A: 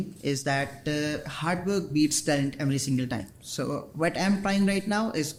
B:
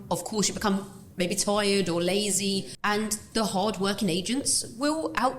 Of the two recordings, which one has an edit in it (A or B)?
B